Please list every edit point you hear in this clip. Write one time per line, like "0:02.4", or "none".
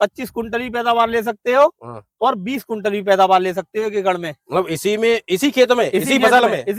none